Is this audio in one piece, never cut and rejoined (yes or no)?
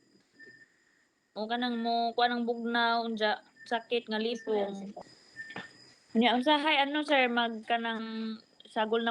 no